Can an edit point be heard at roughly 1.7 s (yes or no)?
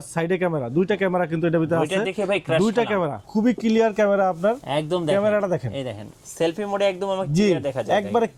no